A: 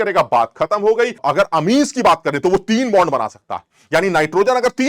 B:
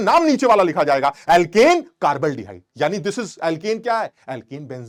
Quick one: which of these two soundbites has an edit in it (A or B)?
A